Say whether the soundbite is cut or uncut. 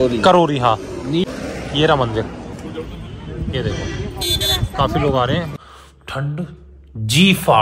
cut